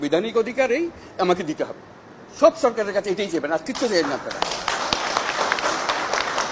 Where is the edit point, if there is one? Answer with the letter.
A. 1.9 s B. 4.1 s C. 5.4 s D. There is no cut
D